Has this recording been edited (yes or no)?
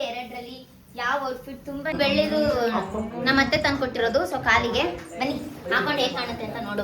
yes